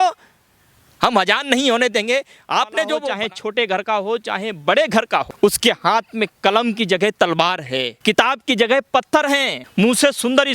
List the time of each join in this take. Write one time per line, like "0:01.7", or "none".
0:03.0
0:05.3
0:07.9
0:09.6

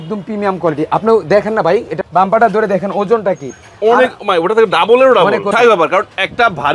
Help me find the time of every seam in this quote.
0:01.9
0:05.5

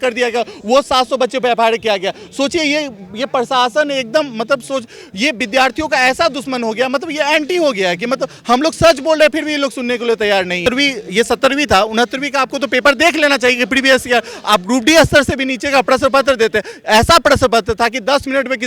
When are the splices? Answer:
0:10.6

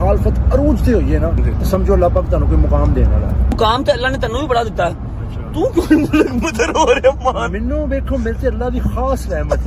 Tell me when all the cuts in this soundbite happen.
0:01.4
0:03.5

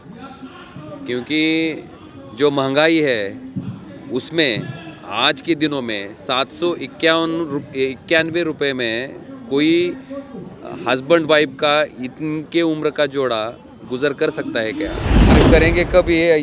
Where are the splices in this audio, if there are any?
0:15.3

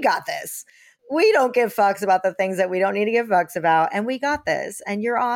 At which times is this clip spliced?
0:00.9

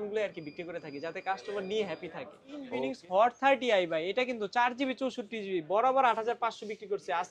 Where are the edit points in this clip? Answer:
0:02.7

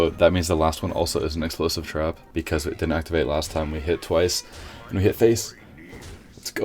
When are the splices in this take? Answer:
0:02.2

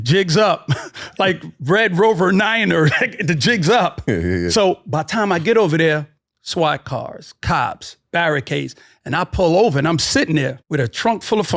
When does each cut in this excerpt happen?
0:10.6

